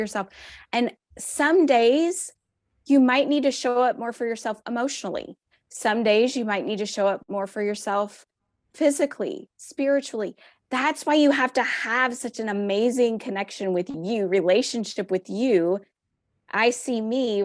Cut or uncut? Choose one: uncut